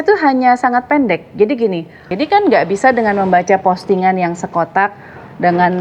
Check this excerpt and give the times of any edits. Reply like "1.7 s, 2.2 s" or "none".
2.0 s

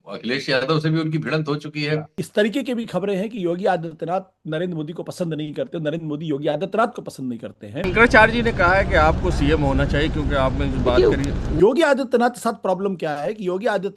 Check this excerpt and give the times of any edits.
2.2 s, 7.9 s, 11.5 s

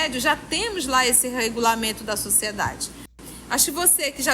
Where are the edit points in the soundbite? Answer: 3.1 s

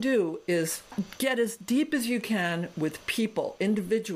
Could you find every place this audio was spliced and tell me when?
0.9 s

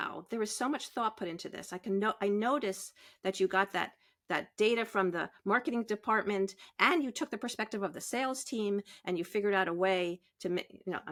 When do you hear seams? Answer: none

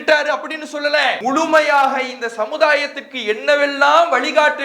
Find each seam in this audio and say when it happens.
1.2 s

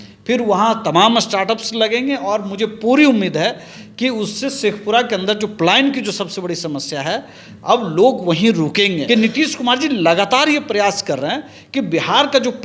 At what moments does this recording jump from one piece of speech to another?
9.0 s

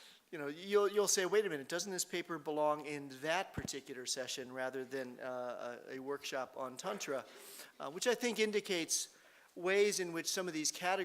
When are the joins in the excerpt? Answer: 4.7 s

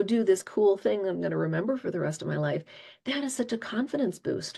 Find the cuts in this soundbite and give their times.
none

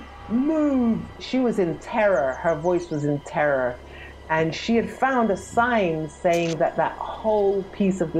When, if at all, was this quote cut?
1.2 s

